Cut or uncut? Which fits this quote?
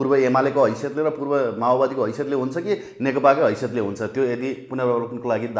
uncut